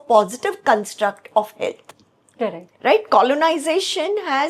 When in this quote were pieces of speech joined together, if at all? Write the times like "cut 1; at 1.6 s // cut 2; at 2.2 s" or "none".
none